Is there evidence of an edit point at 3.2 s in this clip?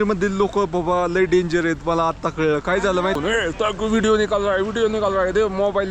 yes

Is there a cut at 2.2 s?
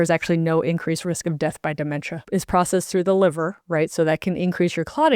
yes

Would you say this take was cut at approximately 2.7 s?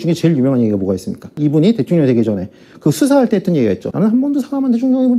no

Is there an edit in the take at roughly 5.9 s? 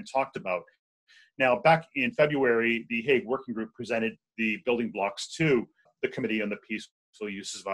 yes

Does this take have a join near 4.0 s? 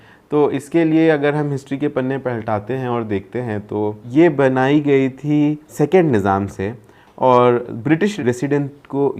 yes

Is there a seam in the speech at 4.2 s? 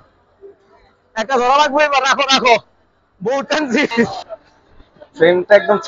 yes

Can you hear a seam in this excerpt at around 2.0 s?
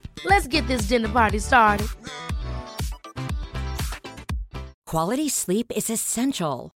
no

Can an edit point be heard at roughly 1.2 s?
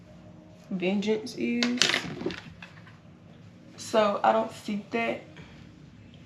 no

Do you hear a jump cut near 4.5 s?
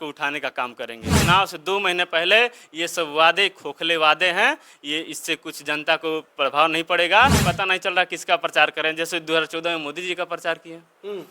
no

